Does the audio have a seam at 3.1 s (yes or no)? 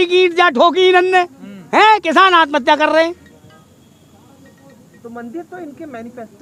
no